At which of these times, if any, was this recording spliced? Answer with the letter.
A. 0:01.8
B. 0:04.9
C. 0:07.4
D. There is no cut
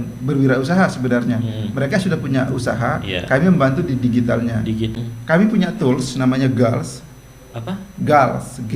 B